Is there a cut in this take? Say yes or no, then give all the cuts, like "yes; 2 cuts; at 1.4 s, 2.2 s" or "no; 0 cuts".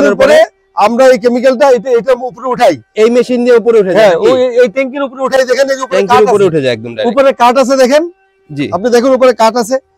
no; 0 cuts